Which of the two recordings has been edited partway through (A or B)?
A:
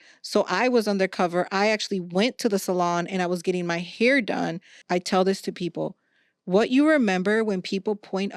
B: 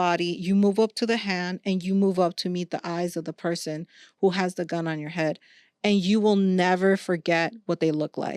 A